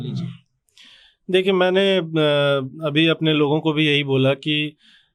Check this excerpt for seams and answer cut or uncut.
uncut